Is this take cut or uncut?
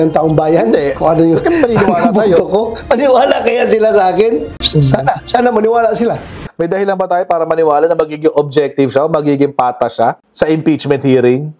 cut